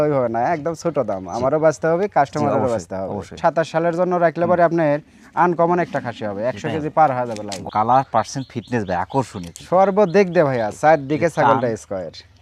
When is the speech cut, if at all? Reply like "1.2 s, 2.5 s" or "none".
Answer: 3.3 s, 7.5 s

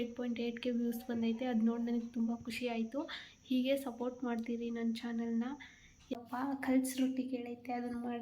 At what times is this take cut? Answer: 6.2 s

